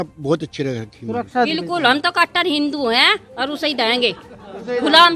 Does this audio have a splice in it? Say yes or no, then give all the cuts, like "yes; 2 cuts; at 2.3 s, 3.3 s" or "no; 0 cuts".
yes; 1 cut; at 1.3 s